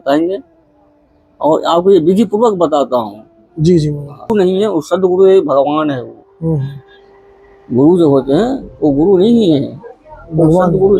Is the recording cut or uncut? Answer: cut